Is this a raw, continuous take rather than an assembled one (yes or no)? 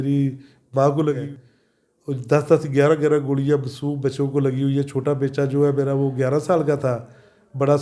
no